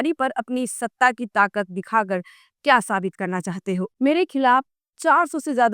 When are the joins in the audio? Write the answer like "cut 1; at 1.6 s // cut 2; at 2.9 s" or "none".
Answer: cut 1; at 3.9 s